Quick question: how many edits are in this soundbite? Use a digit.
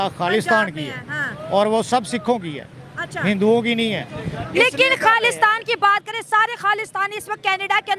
1